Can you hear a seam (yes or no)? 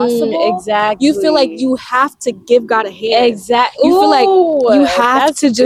no